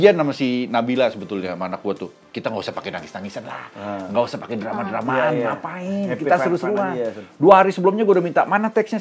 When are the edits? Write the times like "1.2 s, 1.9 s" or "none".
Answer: none

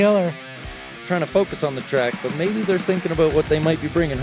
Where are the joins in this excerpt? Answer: 1.1 s

